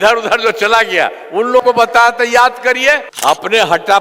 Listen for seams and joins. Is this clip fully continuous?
no; 1 cut; at 3.1 s

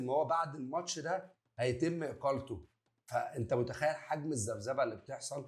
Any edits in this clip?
no; 0 cuts

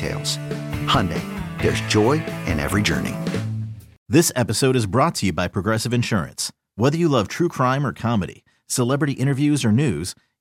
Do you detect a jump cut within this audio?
yes; 1 cut; at 4.0 s

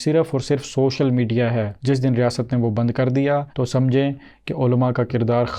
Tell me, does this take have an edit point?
no; 0 cuts

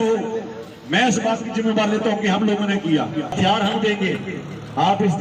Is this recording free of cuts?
no; 1 cut; at 3.4 s

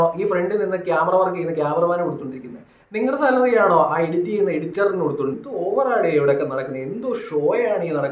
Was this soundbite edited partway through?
yes; 1 cut; at 5.4 s

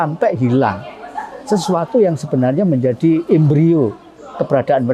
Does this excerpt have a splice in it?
no; 0 cuts

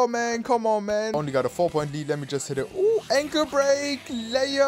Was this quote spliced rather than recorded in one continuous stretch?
yes; 1 cut; at 1.1 s

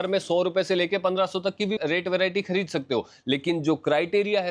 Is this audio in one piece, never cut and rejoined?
no; 1 cut; at 1.8 s

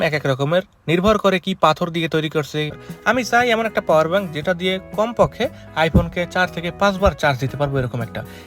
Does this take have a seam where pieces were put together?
yes; 1 cut; at 2.8 s

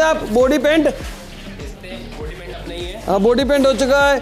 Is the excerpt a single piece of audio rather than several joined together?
yes; 0 cuts

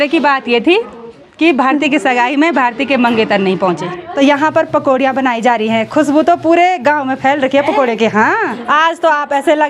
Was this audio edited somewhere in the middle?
yes; 2 cuts; at 4.0 s, 8.5 s

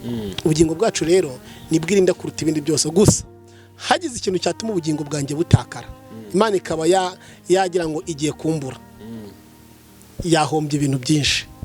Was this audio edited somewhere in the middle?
no; 0 cuts

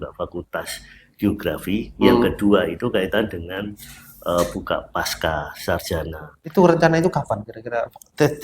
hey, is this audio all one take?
no; 1 cut; at 6.3 s

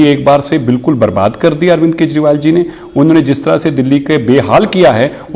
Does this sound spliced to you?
no; 0 cuts

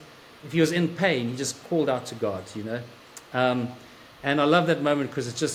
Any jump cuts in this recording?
no; 0 cuts

